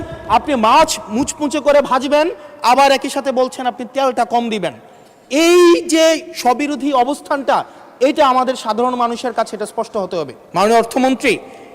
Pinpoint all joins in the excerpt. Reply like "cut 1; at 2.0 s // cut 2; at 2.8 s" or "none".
cut 1; at 10.4 s